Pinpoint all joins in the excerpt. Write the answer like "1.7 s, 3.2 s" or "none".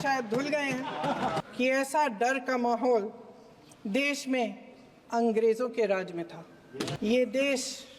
1.4 s, 6.9 s